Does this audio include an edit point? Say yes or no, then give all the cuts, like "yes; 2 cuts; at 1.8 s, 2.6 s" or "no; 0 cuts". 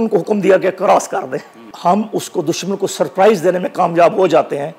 yes; 1 cut; at 1.6 s